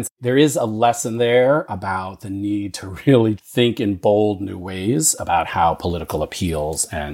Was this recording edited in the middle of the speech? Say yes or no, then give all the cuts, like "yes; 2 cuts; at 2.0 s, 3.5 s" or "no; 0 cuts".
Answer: no; 0 cuts